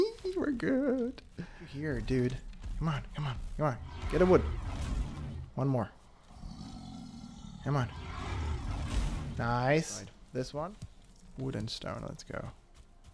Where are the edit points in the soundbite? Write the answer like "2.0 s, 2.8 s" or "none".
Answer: 1.7 s, 10.7 s